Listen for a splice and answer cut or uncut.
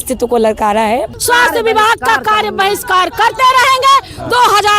cut